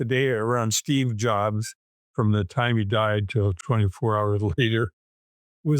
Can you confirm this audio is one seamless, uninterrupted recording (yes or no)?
no